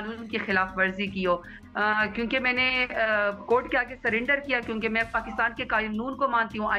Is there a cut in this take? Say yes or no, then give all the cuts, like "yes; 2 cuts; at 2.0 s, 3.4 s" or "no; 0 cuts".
yes; 1 cut; at 1.6 s